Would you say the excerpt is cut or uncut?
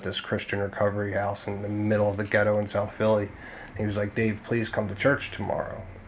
uncut